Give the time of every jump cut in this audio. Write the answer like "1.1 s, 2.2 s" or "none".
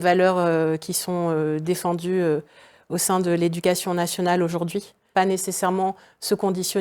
5.0 s